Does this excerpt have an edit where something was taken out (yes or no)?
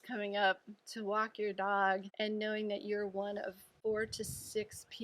yes